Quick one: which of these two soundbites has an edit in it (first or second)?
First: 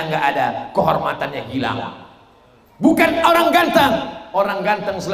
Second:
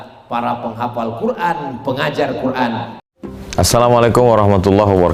second